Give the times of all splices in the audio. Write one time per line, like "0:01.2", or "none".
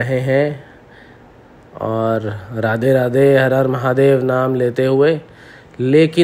none